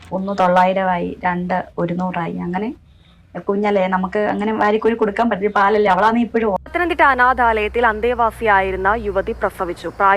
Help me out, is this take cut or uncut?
cut